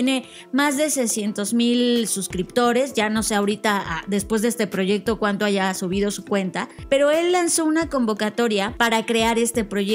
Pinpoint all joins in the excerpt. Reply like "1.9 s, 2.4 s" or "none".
6.7 s, 8.7 s